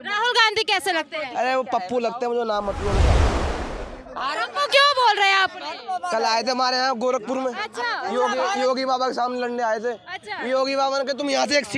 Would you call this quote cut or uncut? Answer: uncut